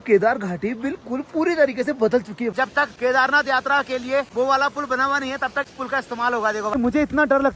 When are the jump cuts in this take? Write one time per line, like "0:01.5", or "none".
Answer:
0:02.6
0:04.3
0:05.8
0:06.8